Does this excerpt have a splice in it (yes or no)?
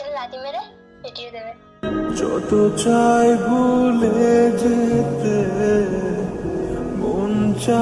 no